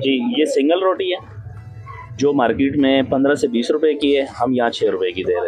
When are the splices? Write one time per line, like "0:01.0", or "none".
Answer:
none